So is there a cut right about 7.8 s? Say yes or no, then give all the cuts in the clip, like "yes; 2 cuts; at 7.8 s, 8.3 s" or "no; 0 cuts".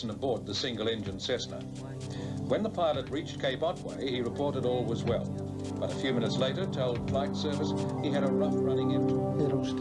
yes; 1 cut; at 7.8 s